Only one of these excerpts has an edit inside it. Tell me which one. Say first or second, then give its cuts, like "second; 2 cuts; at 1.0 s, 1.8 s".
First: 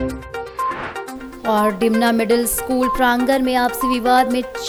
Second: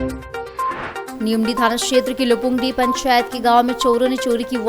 second; 1 cut; at 1.1 s